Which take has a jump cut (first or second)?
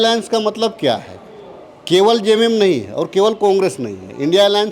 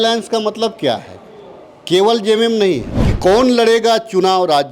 second